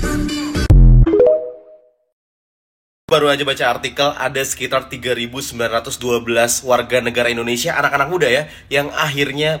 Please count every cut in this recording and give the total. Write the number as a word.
one